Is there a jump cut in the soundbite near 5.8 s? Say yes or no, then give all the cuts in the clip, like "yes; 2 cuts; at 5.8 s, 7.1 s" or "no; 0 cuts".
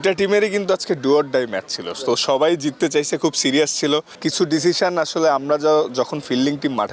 no; 1 cut; at 4.1 s